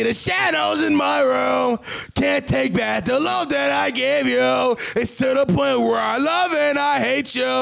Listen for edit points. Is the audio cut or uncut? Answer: uncut